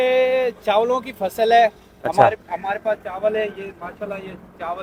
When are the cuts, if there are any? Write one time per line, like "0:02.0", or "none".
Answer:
none